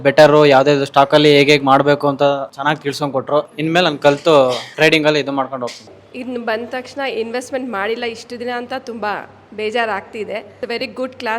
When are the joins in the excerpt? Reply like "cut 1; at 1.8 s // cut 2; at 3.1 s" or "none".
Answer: cut 1; at 3.4 s // cut 2; at 5.9 s // cut 3; at 10.5 s